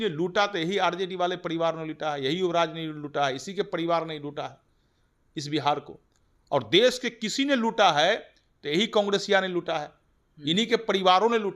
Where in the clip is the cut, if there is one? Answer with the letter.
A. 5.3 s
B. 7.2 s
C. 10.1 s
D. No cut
D